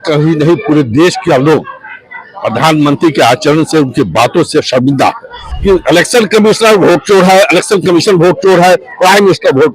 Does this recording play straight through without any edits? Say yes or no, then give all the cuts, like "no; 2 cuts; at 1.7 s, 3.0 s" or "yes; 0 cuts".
no; 1 cut; at 5.5 s